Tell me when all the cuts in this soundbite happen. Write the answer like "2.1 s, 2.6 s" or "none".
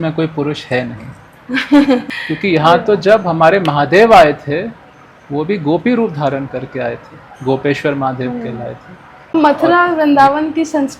2.1 s, 9.3 s